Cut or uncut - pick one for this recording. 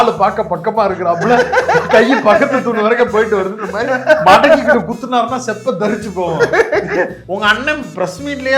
cut